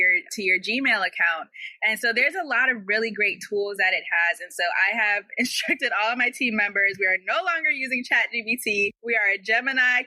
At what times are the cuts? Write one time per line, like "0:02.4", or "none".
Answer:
0:09.0